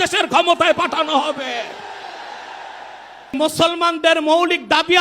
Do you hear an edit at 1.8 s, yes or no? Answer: no